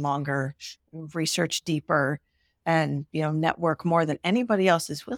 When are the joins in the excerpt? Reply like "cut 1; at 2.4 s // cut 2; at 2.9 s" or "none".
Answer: none

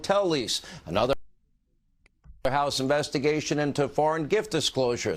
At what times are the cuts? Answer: none

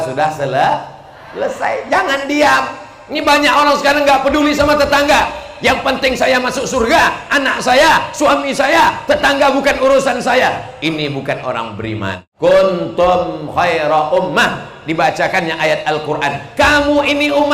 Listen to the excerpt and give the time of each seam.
cut 1; at 12.3 s

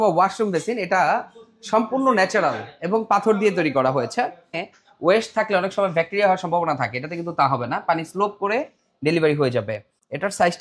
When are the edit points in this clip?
cut 1; at 4.6 s

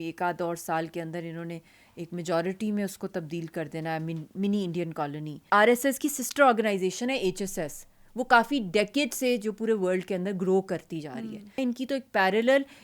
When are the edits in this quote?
cut 1; at 5.4 s // cut 2; at 11.6 s

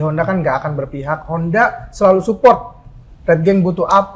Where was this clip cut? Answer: none

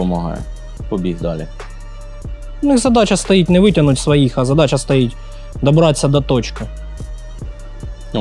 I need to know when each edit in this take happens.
none

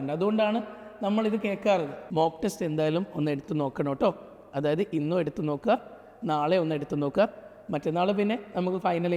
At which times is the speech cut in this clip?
cut 1; at 2.0 s

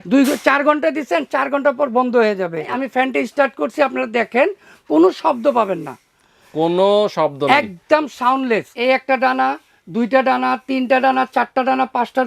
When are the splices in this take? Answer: cut 1; at 2.7 s // cut 2; at 8.7 s

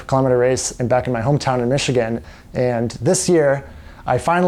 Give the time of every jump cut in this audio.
none

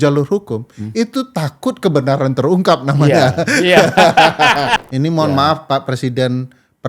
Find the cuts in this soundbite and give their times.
cut 1; at 4.8 s

